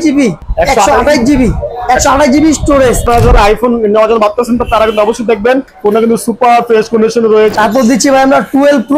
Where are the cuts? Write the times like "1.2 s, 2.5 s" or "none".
3.0 s, 7.5 s